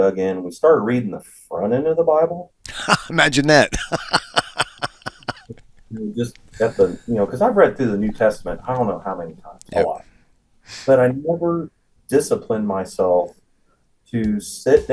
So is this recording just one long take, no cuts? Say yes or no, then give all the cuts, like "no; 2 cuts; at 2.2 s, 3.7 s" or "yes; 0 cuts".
yes; 0 cuts